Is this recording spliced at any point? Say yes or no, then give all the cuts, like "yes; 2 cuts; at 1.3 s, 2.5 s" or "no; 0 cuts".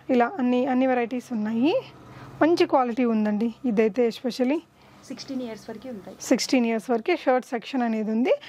no; 0 cuts